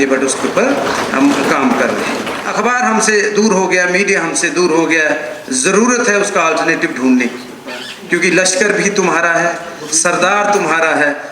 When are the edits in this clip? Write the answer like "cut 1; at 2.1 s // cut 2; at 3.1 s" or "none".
cut 1; at 2.3 s